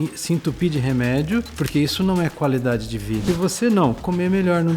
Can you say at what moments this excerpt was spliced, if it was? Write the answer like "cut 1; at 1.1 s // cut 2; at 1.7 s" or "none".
cut 1; at 1.6 s // cut 2; at 3.2 s